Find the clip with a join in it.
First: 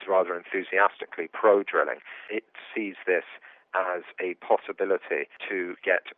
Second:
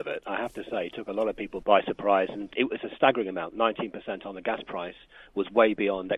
second; 2 cuts; at 1.5 s, 2.5 s

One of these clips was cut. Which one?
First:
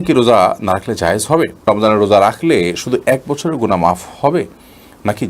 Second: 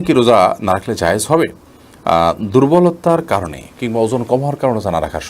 first; 1 cut; at 1.6 s

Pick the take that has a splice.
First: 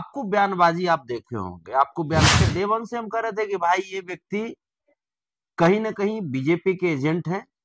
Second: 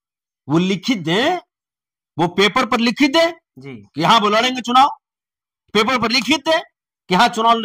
first; 1 cut; at 2.3 s

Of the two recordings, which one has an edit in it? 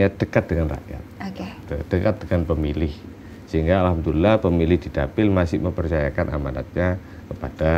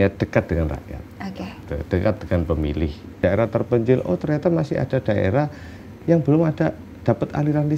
second; 1 cut; at 3.1 s

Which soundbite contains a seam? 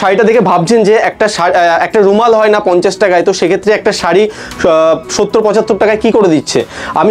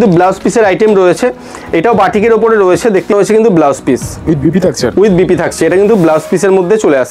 second; 1 cut; at 3.1 s

